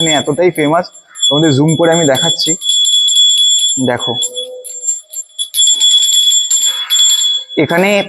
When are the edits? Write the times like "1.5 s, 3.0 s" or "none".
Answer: none